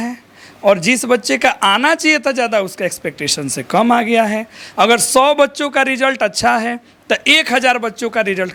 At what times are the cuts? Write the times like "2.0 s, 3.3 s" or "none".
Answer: none